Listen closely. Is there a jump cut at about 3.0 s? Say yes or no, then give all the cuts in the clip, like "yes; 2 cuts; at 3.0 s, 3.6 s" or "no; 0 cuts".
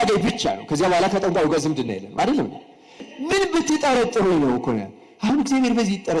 yes; 1 cut; at 3.0 s